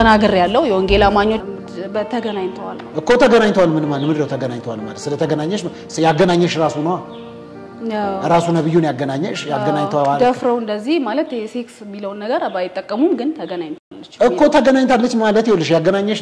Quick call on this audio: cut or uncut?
cut